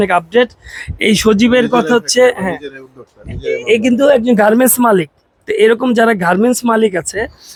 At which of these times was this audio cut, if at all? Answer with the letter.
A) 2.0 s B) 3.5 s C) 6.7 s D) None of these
D